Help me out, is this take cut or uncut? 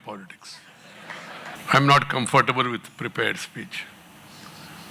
cut